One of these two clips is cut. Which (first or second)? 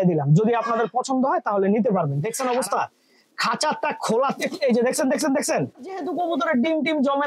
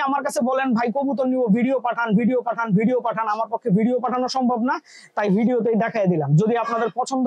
first